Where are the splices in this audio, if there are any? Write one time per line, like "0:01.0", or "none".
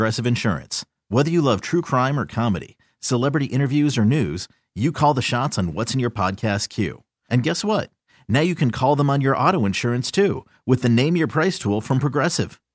none